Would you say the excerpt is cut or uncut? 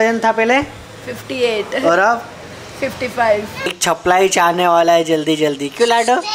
cut